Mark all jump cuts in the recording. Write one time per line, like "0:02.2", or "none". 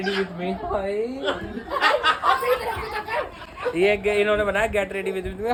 none